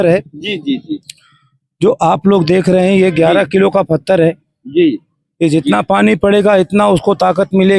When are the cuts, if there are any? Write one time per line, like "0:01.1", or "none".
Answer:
none